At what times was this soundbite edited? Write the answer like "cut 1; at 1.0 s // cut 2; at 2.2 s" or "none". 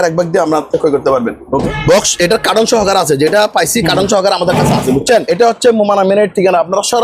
cut 1; at 1.6 s // cut 2; at 5.3 s